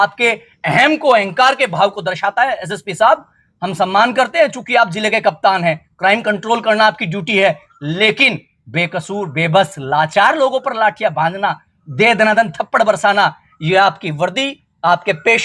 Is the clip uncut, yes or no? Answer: yes